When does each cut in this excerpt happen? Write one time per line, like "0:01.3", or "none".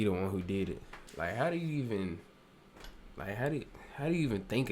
0:01.0